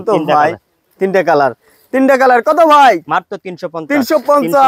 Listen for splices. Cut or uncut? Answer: uncut